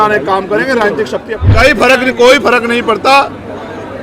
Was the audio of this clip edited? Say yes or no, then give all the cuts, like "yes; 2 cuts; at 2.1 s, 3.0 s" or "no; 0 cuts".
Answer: yes; 1 cut; at 1.4 s